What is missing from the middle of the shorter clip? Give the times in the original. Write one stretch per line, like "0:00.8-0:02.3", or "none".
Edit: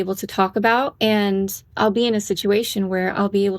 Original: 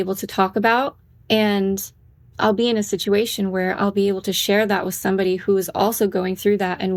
0:00.9-0:01.2
0:01.9-0:02.2